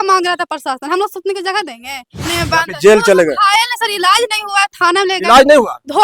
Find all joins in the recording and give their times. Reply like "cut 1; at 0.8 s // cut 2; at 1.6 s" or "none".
cut 1; at 2.2 s